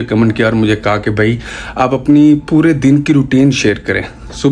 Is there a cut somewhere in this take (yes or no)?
no